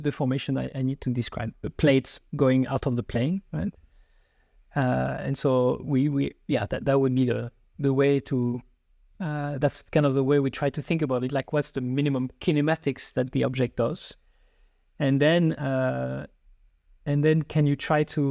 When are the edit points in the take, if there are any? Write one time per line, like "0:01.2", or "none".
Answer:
0:01.6